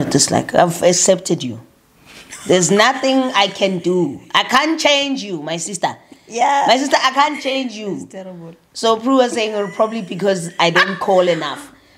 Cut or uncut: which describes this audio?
uncut